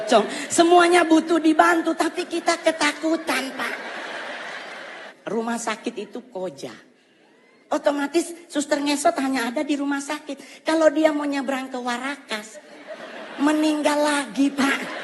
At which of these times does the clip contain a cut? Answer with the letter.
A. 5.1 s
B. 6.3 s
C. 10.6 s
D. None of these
A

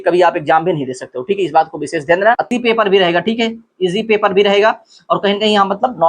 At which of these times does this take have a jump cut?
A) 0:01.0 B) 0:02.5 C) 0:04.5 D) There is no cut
B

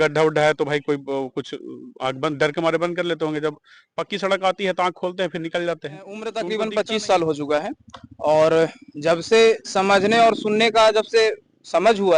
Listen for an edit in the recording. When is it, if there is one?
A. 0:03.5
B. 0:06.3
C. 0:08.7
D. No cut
B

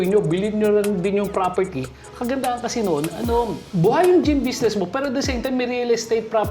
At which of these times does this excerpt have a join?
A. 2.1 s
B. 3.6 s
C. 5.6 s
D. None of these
B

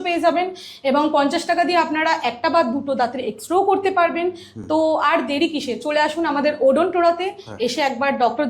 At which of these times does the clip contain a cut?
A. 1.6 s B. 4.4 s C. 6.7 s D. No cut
D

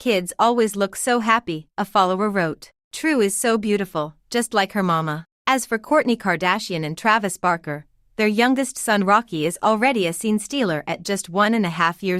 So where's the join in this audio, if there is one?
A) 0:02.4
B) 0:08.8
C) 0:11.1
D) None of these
B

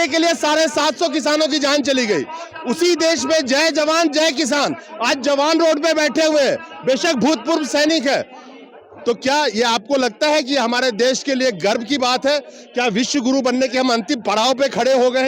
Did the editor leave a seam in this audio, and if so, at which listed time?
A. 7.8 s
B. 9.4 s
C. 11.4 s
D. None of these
D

